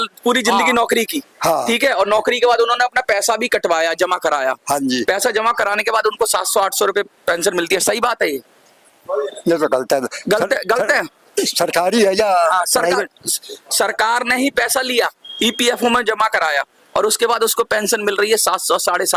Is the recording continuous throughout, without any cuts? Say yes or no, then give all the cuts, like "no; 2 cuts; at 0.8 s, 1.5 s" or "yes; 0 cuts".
yes; 0 cuts